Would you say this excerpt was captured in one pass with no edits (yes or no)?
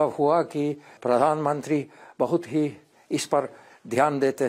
no